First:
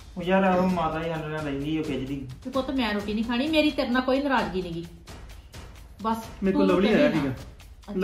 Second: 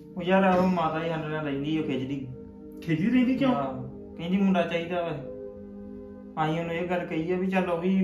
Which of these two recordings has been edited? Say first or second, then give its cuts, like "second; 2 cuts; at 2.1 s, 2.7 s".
first; 1 cut; at 2.4 s